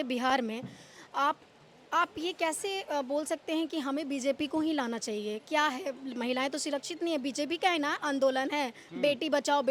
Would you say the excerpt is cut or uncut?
uncut